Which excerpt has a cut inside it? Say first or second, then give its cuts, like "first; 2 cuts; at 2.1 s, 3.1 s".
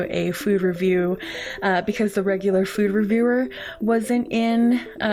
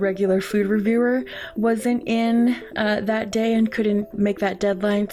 second; 1 cut; at 4.1 s